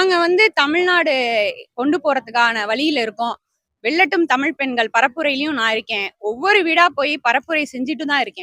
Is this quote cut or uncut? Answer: uncut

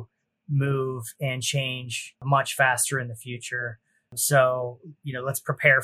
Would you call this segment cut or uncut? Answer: cut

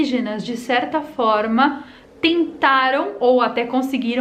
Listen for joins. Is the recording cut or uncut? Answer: uncut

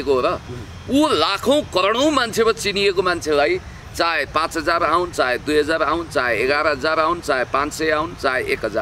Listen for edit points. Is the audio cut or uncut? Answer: uncut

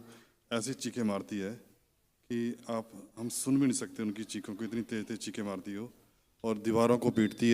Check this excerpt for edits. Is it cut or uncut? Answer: uncut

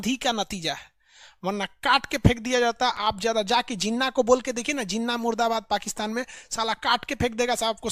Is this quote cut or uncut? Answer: uncut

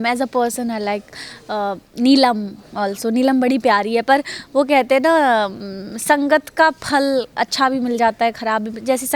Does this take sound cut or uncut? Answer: uncut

